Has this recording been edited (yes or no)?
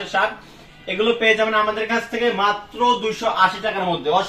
no